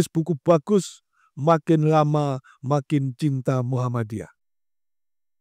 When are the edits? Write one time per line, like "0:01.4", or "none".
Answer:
none